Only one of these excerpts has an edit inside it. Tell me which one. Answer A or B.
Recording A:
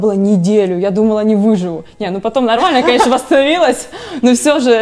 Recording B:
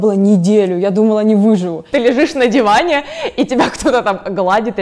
B